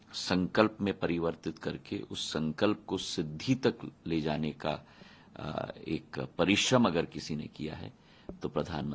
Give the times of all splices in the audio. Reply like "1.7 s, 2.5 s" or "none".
none